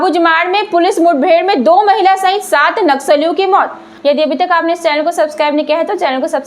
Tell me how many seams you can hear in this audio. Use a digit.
1